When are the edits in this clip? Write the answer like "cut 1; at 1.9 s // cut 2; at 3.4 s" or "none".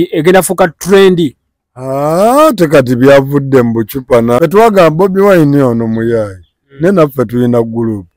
cut 1; at 4.4 s